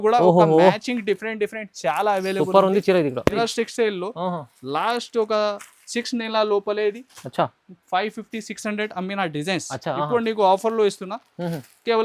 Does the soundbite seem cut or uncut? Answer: cut